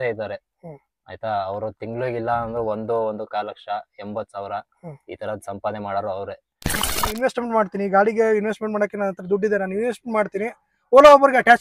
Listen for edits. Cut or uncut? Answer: cut